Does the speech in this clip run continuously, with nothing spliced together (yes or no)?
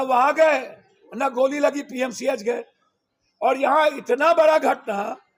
yes